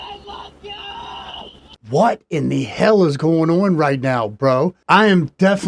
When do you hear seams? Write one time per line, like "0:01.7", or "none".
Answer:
0:01.9
0:04.8

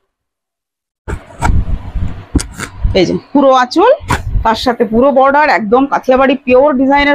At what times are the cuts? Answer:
none

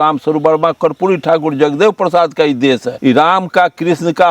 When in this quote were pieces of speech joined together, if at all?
0:02.9

